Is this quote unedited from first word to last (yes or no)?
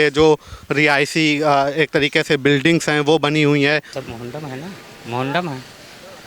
no